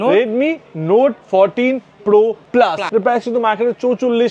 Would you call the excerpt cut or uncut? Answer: cut